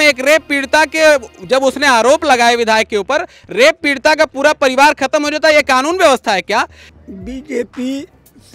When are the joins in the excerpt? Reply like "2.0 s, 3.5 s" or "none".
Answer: 7.0 s